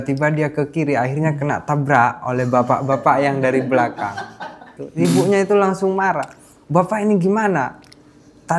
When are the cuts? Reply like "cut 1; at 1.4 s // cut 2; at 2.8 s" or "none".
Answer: cut 1; at 4.8 s